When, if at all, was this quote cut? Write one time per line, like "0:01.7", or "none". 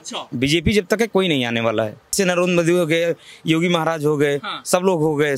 0:02.1